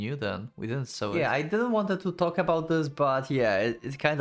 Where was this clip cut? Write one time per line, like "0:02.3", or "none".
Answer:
0:01.1